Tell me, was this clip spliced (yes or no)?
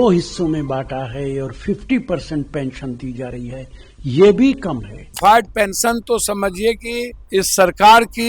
yes